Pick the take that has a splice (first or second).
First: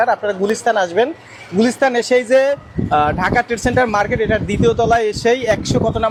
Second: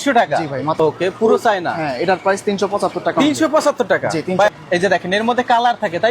second